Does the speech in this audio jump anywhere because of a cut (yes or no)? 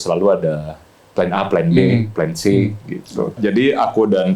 yes